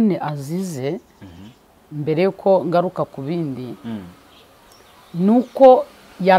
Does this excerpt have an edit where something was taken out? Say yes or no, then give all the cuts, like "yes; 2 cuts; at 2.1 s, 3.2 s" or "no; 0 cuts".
no; 0 cuts